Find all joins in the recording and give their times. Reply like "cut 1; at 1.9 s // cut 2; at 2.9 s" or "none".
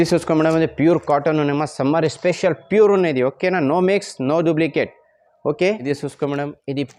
cut 1; at 5.8 s